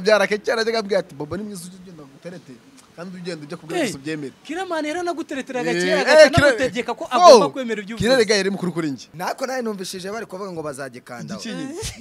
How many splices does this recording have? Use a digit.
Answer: 1